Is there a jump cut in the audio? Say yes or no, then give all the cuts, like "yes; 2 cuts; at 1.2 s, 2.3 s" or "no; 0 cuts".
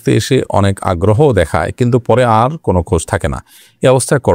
no; 0 cuts